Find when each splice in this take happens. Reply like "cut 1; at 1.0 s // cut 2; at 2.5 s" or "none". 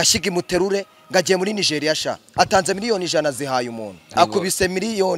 cut 1; at 4.1 s